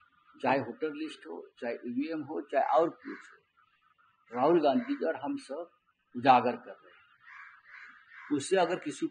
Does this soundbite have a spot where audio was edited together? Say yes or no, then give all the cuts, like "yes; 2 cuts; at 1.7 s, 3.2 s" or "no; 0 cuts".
no; 0 cuts